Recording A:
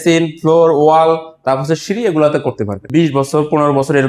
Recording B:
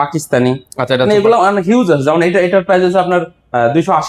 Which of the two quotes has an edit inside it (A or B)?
A